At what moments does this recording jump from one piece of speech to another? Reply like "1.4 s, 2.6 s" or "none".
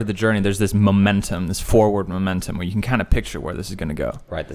none